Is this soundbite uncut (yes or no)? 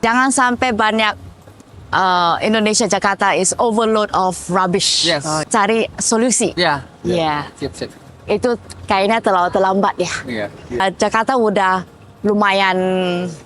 no